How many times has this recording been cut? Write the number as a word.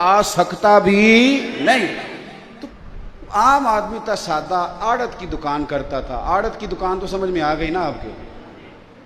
one